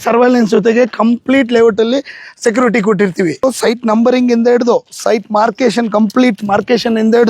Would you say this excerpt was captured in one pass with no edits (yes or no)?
no